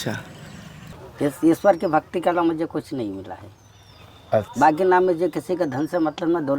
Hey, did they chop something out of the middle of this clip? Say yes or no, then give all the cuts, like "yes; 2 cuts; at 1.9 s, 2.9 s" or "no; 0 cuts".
yes; 1 cut; at 0.9 s